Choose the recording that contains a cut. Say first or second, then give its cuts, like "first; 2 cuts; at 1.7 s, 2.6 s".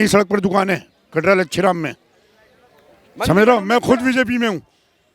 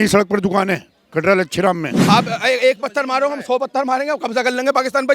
second; 1 cut; at 1.9 s